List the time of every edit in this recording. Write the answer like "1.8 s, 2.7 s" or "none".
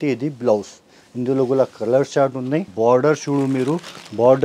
2.7 s